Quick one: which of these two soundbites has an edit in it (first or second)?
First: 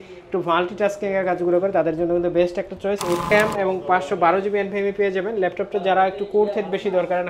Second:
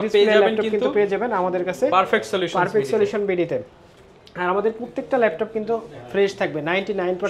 first